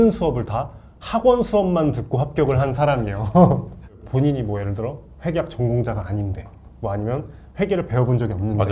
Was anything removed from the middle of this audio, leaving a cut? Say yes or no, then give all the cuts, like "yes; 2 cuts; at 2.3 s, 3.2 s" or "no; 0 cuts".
yes; 1 cut; at 4.0 s